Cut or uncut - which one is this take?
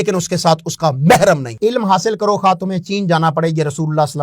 cut